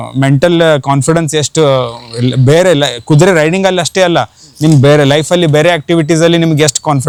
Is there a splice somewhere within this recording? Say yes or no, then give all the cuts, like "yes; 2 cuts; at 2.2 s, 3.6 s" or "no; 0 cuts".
no; 0 cuts